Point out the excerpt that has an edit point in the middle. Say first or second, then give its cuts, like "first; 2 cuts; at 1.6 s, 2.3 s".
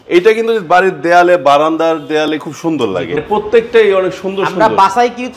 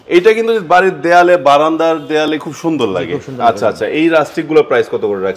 first; 1 cut; at 3.2 s